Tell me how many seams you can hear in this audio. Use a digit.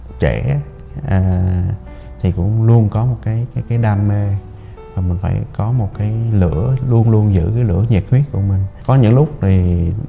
1